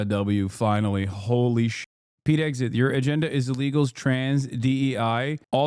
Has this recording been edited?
no; 0 cuts

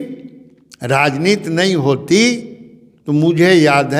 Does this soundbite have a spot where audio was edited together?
no; 0 cuts

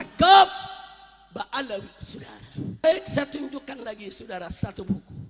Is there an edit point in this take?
yes; 1 cut; at 2.8 s

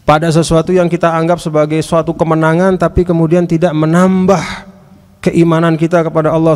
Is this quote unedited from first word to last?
yes; 0 cuts

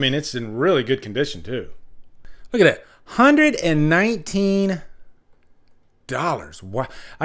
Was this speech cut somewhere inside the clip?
yes; 1 cut; at 2.1 s

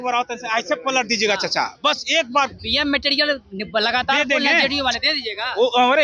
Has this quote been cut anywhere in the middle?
no; 0 cuts

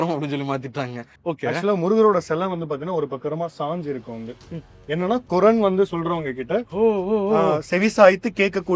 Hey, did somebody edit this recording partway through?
yes; 1 cut; at 1.1 s

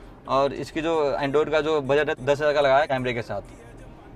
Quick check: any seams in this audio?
yes; 2 cuts; at 2.1 s, 2.9 s

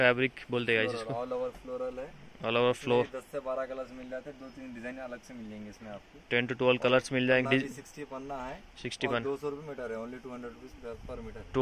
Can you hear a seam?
no; 0 cuts

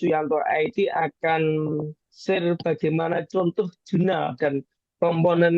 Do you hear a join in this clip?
no; 0 cuts

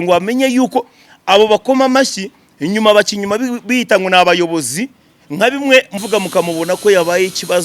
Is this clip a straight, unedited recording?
no; 1 cut; at 6.0 s

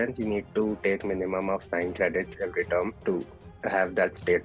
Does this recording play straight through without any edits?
no; 1 cut; at 3.0 s

